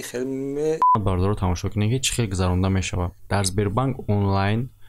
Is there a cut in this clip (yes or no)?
yes